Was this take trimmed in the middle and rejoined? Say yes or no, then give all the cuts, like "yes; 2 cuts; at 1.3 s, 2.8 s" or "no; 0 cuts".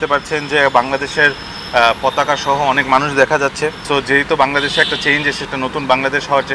yes; 2 cuts; at 3.8 s, 5.4 s